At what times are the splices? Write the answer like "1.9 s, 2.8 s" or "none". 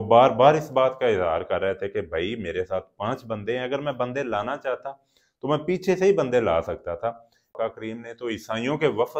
7.5 s